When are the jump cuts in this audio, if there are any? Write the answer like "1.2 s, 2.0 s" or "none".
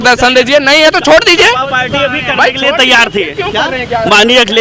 none